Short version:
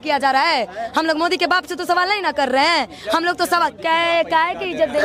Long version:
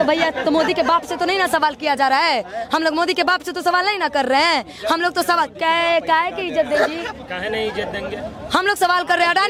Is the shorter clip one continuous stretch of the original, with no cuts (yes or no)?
yes